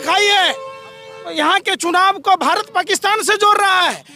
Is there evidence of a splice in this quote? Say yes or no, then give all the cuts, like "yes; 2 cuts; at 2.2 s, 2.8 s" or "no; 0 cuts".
yes; 1 cut; at 1.2 s